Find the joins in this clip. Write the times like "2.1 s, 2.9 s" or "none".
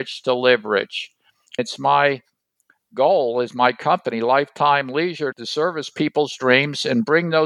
1.6 s